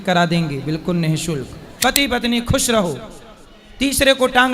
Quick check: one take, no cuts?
no; 1 cut; at 1.6 s

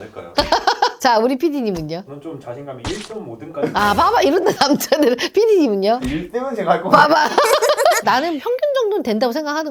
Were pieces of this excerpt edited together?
yes; 1 cut; at 8.0 s

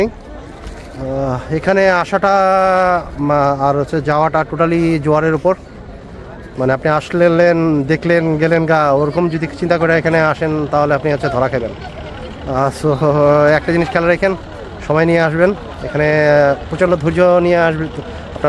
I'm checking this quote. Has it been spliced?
no; 0 cuts

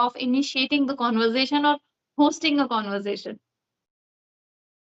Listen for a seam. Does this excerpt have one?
no; 0 cuts

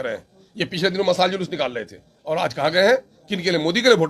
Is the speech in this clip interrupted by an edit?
no; 0 cuts

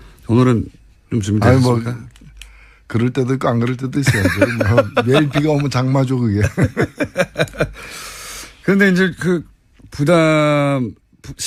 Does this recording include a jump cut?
no; 0 cuts

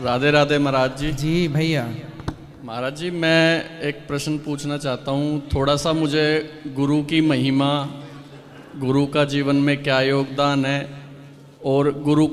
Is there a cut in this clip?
no; 0 cuts

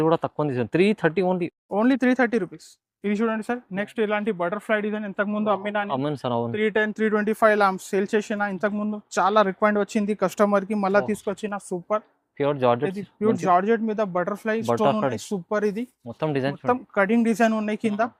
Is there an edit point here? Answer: no; 0 cuts

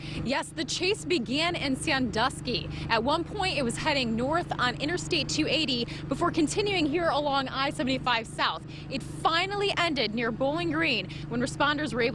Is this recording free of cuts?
yes; 0 cuts

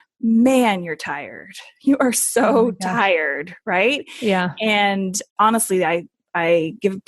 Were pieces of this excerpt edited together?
yes; 1 cut; at 5.2 s

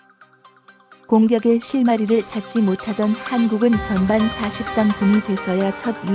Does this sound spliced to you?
yes; 1 cut; at 1.0 s

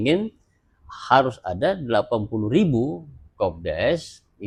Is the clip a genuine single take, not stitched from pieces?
yes; 0 cuts

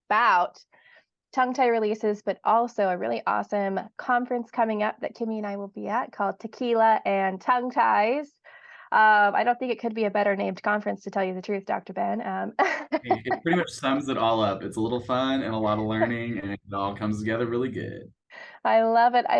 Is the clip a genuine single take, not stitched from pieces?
yes; 0 cuts

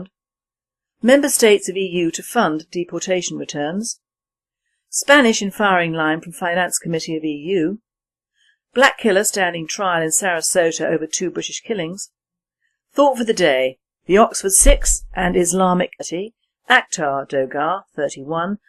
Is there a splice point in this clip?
no; 0 cuts

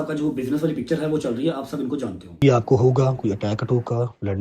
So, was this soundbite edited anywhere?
yes; 1 cut; at 2.4 s

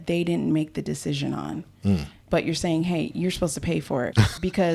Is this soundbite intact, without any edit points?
no; 1 cut; at 2.3 s

